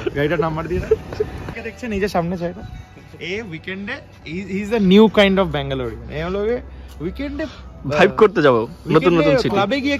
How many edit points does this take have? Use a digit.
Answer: 1